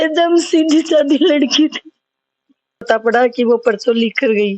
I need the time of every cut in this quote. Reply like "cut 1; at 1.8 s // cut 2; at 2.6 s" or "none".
cut 1; at 2.9 s